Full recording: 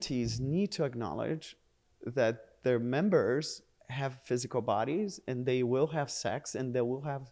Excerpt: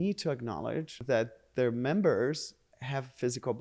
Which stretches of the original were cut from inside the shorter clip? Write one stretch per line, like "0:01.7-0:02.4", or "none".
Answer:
0:01.5-0:02.0